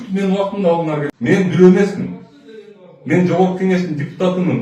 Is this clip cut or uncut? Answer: cut